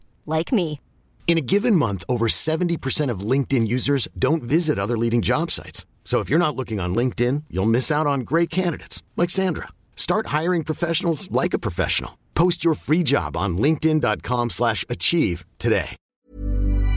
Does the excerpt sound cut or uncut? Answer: cut